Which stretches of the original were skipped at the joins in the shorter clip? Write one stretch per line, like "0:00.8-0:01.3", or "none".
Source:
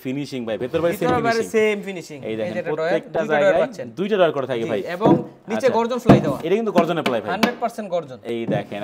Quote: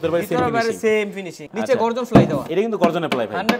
0:02.1-0:05.4